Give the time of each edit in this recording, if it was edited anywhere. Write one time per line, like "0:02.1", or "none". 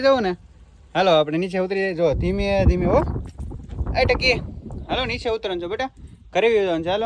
none